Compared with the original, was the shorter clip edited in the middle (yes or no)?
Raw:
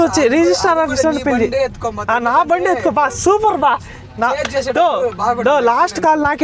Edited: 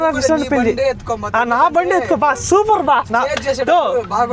yes